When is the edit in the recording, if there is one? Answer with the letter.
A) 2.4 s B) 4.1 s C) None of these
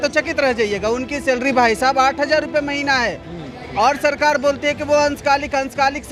C